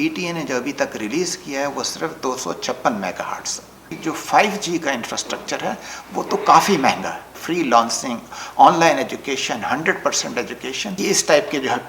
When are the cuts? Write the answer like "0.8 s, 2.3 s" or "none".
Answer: 3.9 s, 7.3 s, 11.0 s